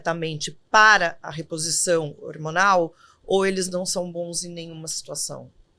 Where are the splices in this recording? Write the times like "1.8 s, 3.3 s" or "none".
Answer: none